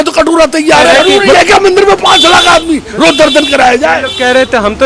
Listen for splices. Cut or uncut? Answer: cut